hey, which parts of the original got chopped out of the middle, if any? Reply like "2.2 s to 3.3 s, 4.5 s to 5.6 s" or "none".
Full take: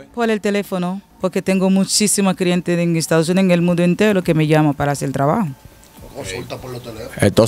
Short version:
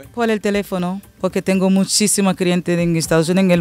none